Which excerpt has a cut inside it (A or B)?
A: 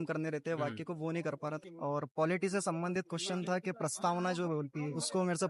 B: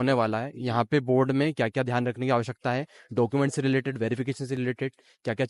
A